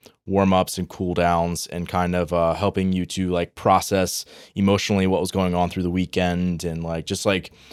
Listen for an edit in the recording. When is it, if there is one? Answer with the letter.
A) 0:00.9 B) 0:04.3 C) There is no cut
C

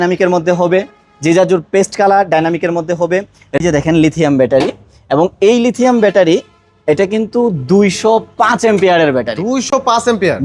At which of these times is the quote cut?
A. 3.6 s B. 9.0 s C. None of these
A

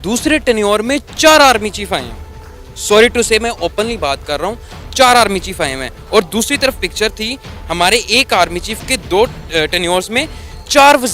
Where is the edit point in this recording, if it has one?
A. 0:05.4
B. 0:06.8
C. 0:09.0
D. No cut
C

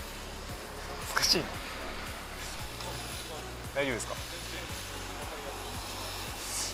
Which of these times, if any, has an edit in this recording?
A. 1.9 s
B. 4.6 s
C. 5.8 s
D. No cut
D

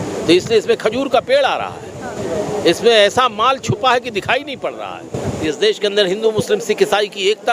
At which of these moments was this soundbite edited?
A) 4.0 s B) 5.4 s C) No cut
B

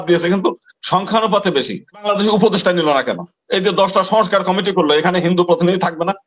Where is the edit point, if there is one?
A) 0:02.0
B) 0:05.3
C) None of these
A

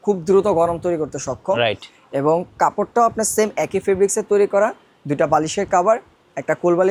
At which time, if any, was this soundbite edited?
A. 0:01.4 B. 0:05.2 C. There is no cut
C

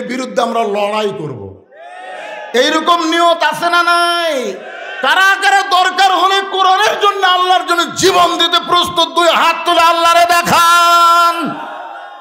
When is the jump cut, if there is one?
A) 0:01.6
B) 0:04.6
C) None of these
C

